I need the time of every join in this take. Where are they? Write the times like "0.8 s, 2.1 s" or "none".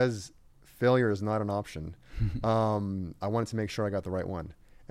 none